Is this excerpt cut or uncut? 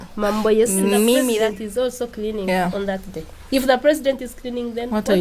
cut